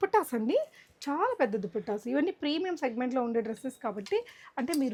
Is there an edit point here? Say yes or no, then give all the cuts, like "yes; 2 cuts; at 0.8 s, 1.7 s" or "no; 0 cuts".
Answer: no; 0 cuts